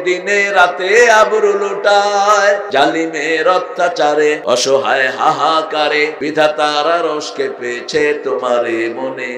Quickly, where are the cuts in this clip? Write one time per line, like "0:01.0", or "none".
0:02.6
0:04.4
0:06.2